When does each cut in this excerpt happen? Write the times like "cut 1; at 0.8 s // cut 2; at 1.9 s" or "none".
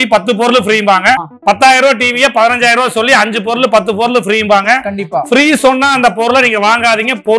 cut 1; at 1.3 s